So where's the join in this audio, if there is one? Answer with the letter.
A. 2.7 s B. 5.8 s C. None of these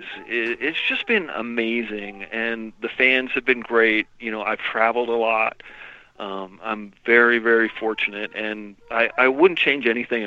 C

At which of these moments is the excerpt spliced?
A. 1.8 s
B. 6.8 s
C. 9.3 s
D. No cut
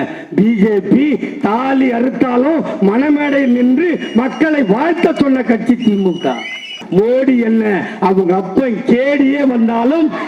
B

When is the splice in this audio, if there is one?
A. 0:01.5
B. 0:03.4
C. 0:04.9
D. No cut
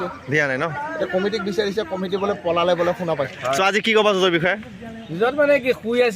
B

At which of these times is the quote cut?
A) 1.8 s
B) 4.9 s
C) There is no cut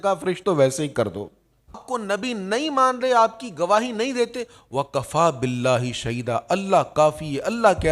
A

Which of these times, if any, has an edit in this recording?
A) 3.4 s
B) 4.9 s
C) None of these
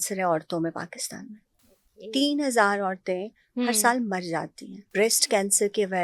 B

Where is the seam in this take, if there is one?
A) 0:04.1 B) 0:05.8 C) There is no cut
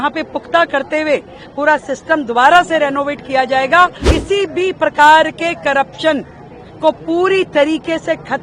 A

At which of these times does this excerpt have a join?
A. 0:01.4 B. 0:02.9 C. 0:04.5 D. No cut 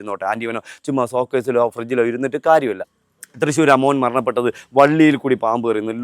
B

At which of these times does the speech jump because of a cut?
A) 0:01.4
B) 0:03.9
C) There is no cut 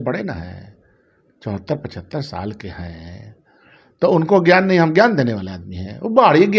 C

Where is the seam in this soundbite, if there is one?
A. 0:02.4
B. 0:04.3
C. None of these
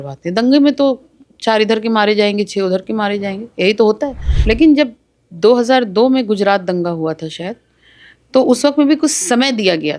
B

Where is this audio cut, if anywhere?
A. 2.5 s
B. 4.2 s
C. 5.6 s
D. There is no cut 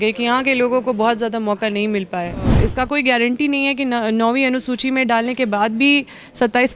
A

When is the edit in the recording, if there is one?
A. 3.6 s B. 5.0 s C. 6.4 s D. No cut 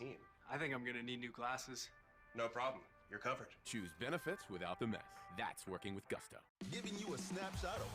C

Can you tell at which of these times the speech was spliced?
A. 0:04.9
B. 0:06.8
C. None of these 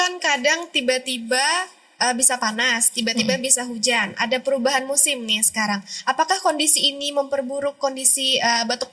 C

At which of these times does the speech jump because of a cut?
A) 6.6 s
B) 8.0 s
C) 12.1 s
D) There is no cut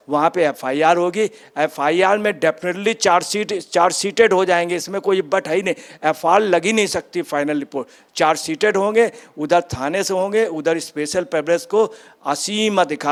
D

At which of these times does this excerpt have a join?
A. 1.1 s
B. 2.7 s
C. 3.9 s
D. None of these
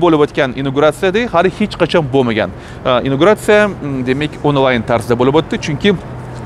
D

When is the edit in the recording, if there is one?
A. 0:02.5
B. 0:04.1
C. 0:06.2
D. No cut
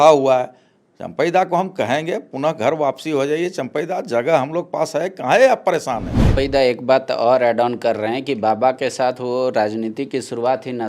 C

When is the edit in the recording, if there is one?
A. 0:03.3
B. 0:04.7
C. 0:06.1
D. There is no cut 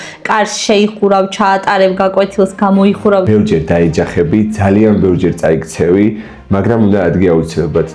A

